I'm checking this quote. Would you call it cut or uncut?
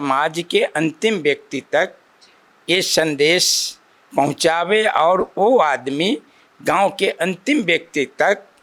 uncut